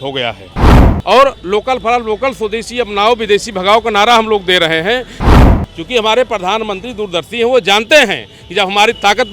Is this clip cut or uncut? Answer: cut